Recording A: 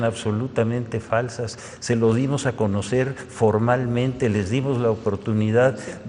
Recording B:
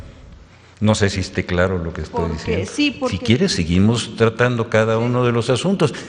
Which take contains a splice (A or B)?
B